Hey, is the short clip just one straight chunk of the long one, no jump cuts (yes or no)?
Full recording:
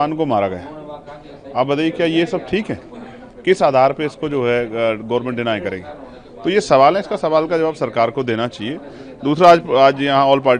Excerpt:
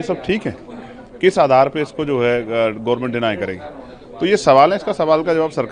yes